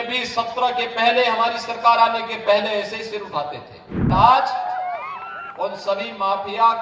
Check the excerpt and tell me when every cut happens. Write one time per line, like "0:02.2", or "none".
0:04.1